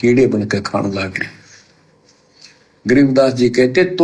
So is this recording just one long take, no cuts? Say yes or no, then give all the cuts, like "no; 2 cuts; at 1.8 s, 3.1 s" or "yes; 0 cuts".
no; 1 cut; at 1.2 s